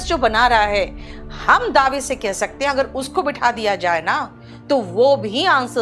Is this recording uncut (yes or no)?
yes